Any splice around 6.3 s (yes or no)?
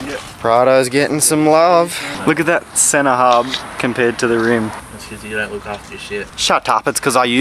yes